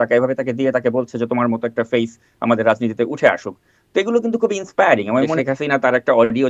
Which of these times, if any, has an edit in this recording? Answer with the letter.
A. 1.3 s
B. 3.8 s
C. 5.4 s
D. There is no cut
C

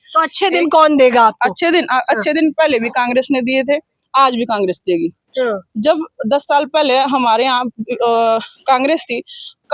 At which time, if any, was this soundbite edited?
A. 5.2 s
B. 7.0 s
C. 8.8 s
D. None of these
D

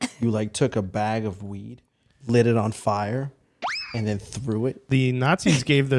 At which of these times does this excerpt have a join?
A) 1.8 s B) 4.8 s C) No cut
B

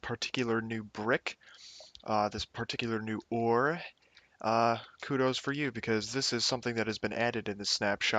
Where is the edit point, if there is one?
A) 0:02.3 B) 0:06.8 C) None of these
B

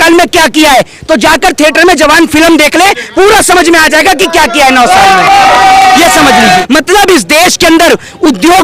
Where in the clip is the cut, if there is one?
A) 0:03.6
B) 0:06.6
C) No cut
B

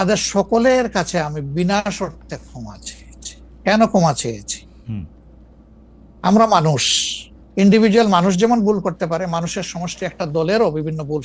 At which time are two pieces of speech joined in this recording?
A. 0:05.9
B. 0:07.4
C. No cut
C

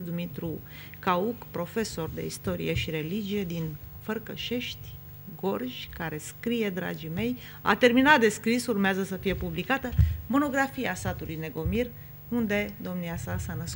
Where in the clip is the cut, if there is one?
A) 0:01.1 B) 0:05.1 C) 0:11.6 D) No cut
D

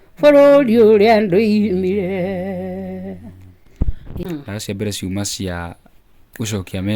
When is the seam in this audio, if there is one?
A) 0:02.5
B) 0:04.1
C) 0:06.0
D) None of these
B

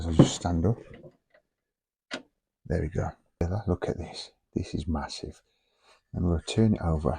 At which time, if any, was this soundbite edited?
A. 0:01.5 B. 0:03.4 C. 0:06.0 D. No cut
B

